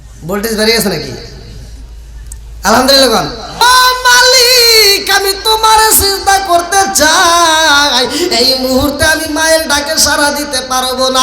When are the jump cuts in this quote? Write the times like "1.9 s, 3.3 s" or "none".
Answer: 3.6 s

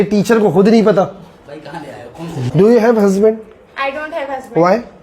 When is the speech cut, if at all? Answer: 2.4 s

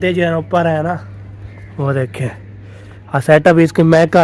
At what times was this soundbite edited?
none

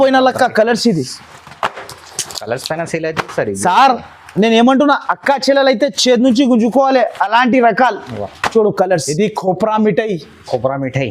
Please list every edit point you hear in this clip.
9.1 s

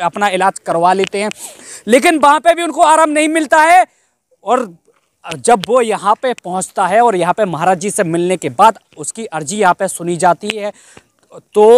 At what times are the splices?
none

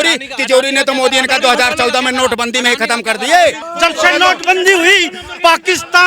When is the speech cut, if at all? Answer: 3.7 s

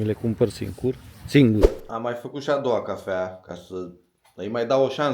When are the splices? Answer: 1.8 s

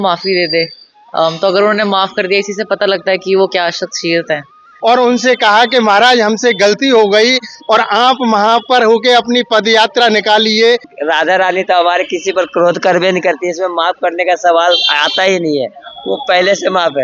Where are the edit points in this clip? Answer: 4.6 s, 10.9 s

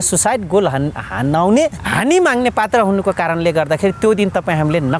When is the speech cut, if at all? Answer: 1.8 s

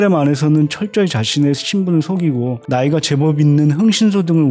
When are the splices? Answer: none

